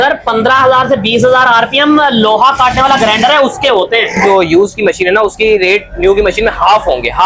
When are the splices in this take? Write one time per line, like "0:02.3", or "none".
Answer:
0:04.2